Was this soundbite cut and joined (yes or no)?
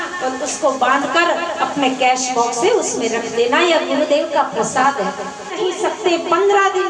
yes